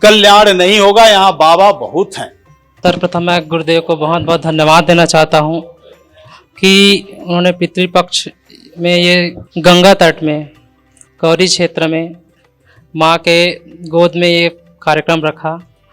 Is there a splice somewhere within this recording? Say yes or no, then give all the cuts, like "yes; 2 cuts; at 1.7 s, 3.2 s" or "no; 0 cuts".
yes; 2 cuts; at 2.7 s, 9.4 s